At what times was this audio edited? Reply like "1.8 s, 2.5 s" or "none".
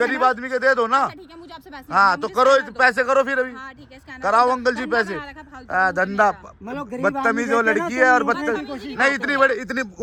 none